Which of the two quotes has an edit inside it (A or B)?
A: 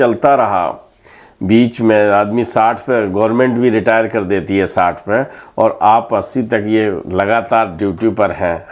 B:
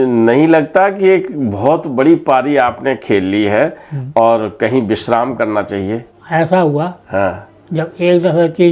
B